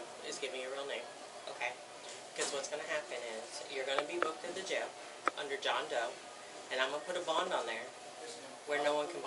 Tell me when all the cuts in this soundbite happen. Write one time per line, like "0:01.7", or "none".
none

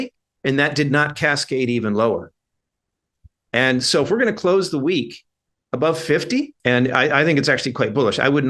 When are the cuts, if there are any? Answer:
0:06.5

